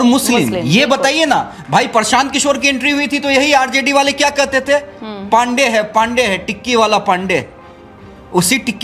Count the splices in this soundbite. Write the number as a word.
zero